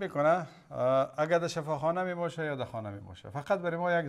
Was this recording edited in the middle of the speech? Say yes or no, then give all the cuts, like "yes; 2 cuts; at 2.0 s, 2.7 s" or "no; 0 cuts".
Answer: no; 0 cuts